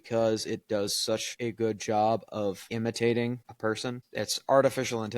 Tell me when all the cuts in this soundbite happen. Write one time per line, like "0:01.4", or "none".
0:01.3
0:02.6
0:04.0